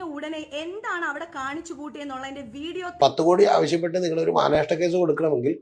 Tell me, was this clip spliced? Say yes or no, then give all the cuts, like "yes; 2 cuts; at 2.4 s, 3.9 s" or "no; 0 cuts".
yes; 1 cut; at 2.8 s